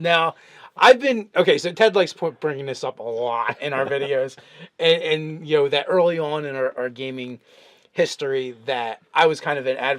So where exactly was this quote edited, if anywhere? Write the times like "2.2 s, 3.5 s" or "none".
7.9 s

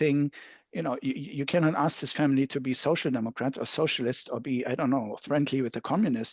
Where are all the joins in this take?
none

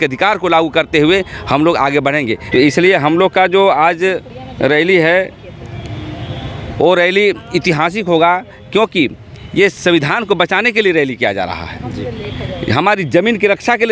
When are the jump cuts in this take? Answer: 2.4 s

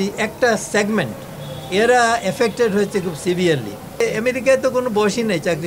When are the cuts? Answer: 4.0 s

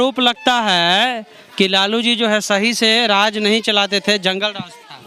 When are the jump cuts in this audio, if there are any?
none

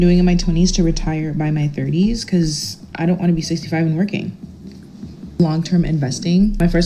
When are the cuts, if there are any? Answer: none

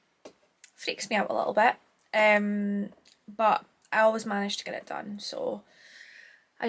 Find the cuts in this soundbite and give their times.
none

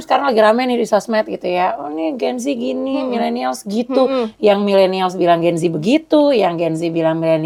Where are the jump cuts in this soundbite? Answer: none

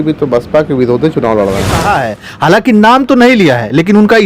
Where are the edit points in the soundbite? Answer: 1.7 s

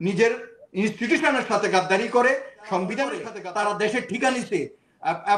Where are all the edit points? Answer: 3.3 s

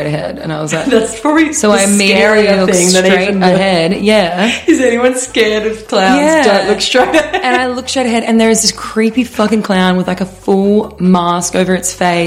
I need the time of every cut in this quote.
none

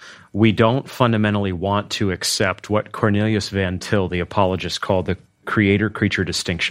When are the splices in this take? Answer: 5.5 s

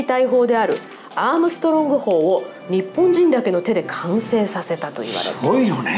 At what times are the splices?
none

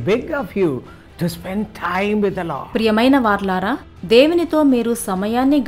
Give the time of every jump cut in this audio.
none

